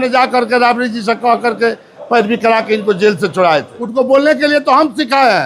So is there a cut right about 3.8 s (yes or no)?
yes